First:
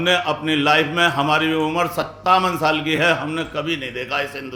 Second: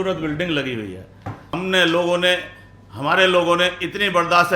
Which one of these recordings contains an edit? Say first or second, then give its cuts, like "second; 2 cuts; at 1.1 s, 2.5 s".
second; 1 cut; at 1.6 s